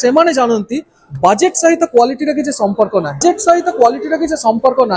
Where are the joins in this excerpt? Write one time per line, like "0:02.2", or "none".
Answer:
0:03.2